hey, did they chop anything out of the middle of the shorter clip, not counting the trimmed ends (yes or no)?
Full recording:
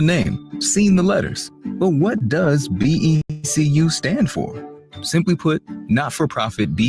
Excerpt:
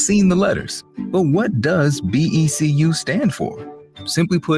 yes